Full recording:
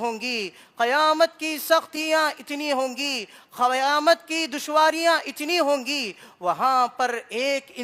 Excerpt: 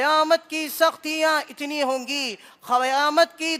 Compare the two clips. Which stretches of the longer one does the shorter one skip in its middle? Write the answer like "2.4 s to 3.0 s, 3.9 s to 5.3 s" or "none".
none